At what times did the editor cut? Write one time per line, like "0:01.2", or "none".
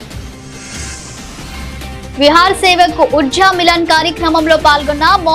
0:01.3